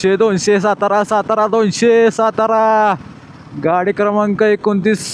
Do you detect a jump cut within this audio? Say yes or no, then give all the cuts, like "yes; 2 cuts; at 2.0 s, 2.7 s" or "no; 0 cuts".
no; 0 cuts